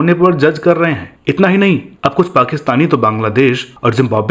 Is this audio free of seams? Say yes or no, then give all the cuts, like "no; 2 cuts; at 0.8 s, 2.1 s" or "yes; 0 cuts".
no; 1 cut; at 1.1 s